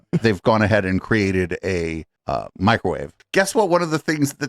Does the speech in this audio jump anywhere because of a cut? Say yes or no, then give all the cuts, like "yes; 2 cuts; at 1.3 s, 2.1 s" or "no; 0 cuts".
yes; 1 cut; at 3.2 s